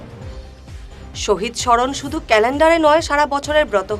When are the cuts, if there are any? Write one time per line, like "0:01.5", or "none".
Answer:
0:01.2